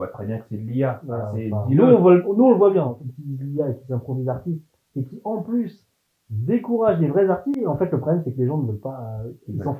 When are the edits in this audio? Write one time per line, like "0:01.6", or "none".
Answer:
0:02.9
0:07.6